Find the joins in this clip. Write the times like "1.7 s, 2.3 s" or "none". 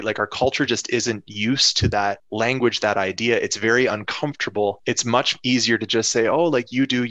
2.2 s, 4.8 s